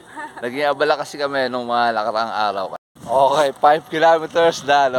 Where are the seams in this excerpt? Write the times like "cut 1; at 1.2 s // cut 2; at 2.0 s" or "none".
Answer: cut 1; at 2.8 s